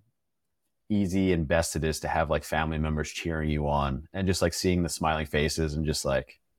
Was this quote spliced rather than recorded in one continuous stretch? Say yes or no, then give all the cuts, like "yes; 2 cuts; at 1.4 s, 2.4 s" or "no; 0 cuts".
no; 0 cuts